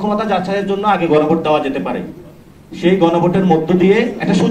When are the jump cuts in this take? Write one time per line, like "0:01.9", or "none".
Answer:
none